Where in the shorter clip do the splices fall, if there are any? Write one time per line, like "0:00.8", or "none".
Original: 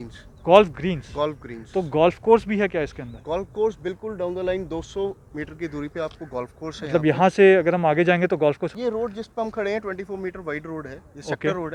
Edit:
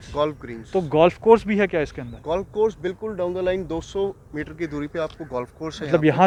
none

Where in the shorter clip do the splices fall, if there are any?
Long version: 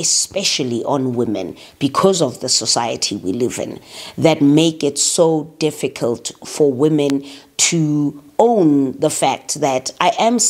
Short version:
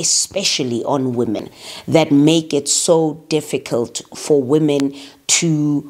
0:01.6

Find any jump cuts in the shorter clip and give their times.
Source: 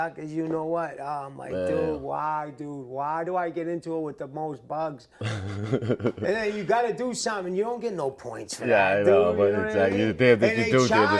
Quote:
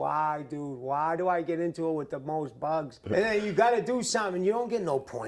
0:03.1

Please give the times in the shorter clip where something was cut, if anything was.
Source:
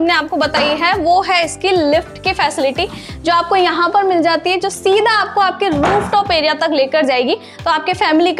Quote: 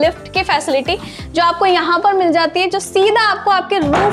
none

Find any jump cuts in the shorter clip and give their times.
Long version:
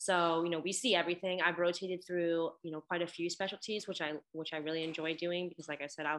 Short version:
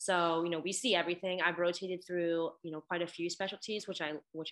none

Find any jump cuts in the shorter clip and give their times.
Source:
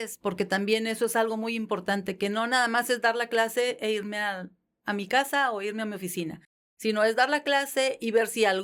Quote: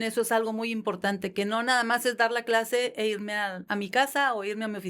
0:03.6

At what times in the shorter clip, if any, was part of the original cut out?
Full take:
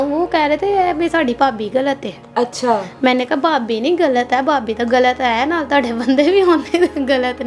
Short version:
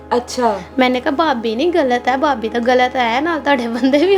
none

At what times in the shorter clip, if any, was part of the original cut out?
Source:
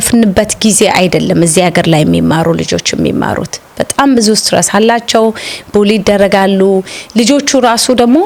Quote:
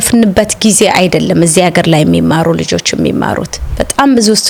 none

